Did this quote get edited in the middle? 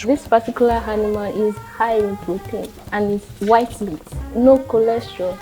no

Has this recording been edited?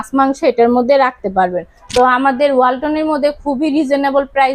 no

